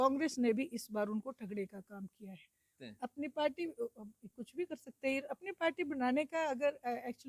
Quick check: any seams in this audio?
yes; 1 cut; at 2.8 s

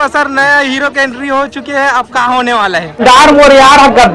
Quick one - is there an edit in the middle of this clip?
yes; 1 cut; at 3.0 s

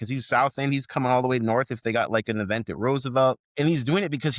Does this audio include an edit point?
yes; 1 cut; at 3.5 s

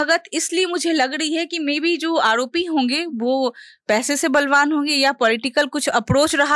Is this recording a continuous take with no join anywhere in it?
yes; 0 cuts

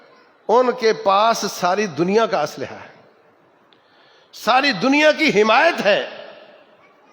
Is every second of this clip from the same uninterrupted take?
yes; 0 cuts

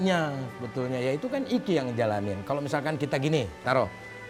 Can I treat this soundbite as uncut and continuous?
yes; 0 cuts

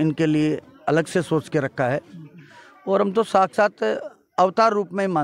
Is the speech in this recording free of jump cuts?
yes; 0 cuts

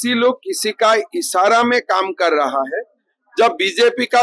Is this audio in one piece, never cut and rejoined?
yes; 0 cuts

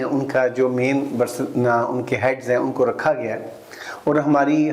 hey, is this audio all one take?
yes; 0 cuts

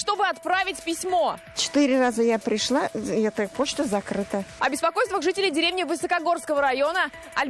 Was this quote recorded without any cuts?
yes; 0 cuts

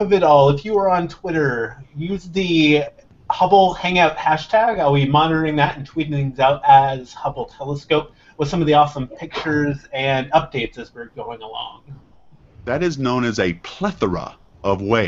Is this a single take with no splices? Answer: no; 1 cut; at 1.5 s

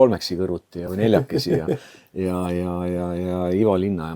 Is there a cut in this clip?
no; 0 cuts

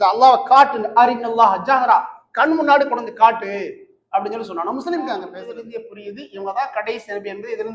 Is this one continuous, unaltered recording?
no; 1 cut; at 5.6 s

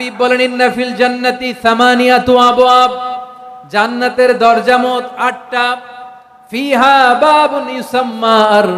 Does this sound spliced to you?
no; 0 cuts

